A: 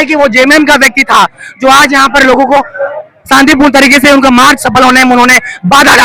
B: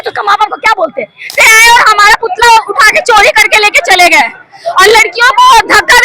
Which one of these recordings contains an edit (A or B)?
B